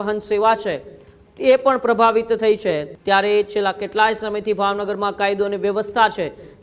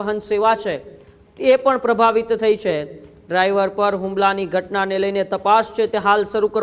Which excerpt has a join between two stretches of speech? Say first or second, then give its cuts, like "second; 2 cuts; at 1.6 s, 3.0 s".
first; 1 cut; at 2.9 s